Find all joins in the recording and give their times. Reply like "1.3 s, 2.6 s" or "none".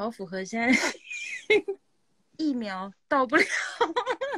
1.8 s